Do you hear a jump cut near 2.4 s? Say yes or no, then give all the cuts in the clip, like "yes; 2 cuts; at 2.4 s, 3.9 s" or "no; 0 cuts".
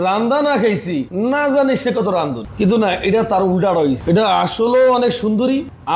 yes; 2 cuts; at 1.1 s, 2.4 s